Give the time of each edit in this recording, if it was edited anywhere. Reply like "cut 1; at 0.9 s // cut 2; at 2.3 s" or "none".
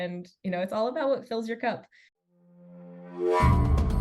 cut 1; at 1.9 s